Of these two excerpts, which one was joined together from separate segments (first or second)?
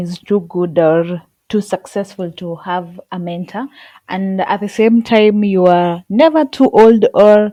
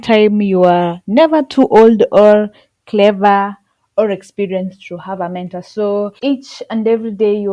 second